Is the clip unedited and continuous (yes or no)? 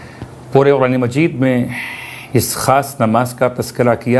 no